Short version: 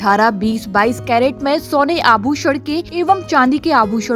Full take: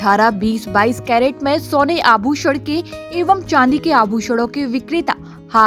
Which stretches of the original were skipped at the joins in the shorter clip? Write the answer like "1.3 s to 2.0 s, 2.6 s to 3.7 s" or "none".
2.9 s to 3.1 s